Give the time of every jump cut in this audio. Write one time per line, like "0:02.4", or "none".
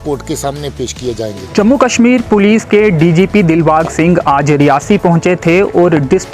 0:01.6